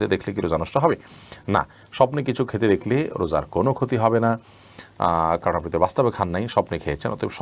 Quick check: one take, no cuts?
yes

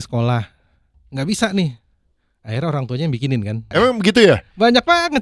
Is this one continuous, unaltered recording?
no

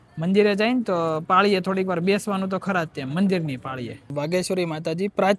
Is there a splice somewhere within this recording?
yes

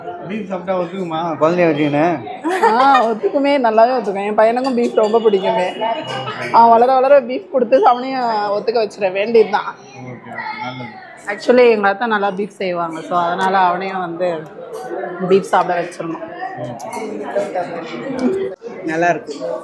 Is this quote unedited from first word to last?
no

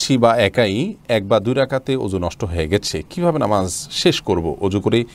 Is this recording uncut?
yes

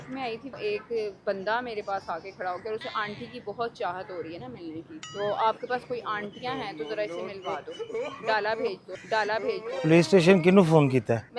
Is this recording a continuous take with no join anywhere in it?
no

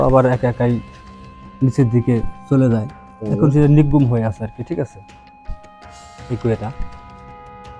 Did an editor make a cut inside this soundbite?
no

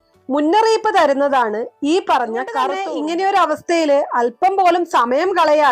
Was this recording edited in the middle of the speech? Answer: yes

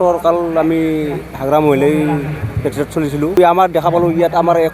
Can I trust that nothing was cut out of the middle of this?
no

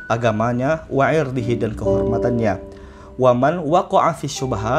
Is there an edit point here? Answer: no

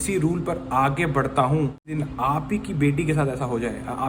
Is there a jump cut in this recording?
yes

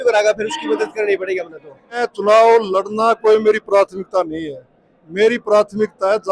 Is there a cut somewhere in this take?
yes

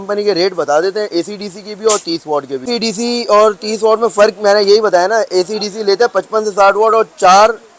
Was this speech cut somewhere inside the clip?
no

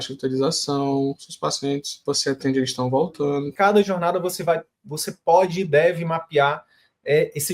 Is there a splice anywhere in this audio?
yes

